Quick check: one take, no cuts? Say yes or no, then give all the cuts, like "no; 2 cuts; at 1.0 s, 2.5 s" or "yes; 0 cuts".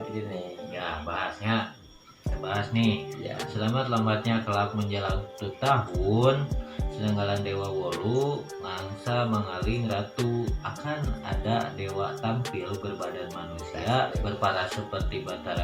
yes; 0 cuts